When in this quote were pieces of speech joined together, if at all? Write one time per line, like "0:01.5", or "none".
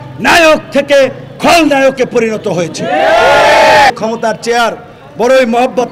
0:03.9